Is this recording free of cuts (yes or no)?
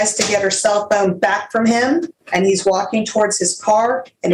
no